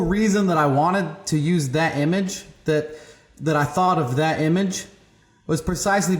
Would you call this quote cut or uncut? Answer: uncut